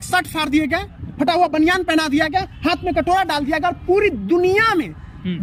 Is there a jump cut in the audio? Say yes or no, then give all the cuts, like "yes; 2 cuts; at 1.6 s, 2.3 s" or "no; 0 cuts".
no; 0 cuts